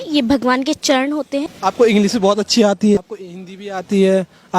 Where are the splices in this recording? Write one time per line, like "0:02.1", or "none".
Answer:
0:01.5
0:03.0